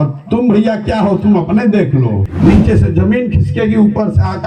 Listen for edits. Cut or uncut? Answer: cut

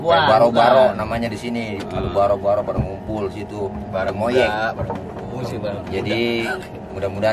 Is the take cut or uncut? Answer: uncut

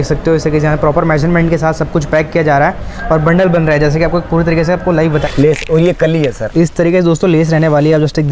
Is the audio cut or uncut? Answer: cut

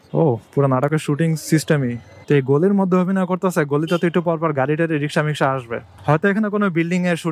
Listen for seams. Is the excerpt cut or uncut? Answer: uncut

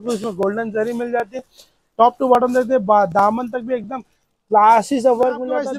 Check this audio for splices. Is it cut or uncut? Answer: uncut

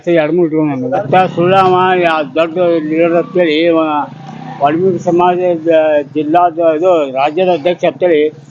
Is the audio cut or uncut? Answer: cut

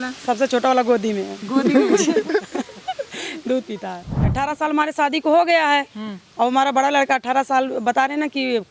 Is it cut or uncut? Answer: cut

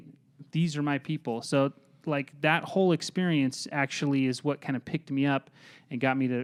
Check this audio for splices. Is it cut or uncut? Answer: uncut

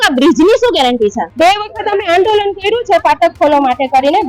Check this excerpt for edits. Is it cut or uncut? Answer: cut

